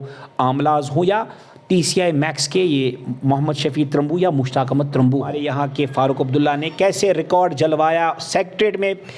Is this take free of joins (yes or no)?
no